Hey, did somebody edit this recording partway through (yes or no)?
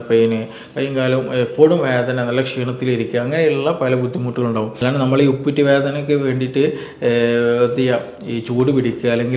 yes